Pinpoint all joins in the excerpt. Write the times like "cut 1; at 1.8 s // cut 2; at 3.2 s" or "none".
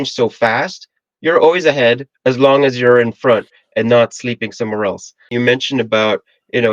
cut 1; at 5.3 s